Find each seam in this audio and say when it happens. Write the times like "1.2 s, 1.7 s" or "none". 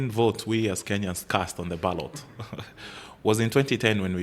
none